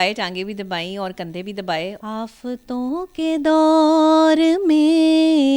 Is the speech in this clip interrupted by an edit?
yes; 1 cut; at 2.0 s

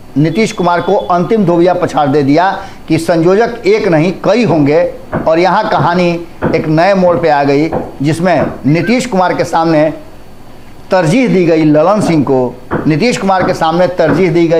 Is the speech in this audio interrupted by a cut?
no; 0 cuts

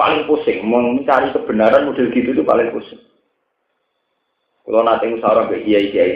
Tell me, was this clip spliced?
no; 0 cuts

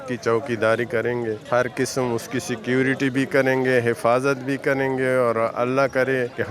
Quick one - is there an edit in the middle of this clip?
no; 0 cuts

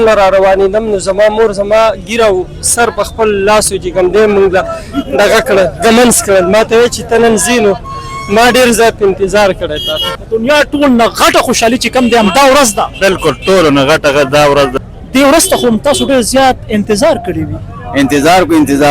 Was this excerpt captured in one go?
no; 2 cuts; at 10.1 s, 14.8 s

